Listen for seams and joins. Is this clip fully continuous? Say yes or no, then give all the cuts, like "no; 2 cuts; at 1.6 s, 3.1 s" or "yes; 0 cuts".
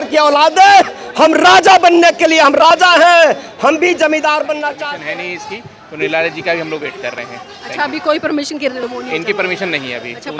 no; 1 cut; at 4.8 s